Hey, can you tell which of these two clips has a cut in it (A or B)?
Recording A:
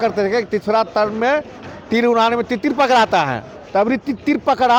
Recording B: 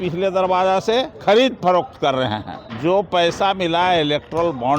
B